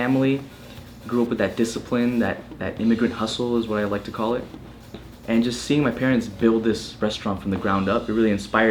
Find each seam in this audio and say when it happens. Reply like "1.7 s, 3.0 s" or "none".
none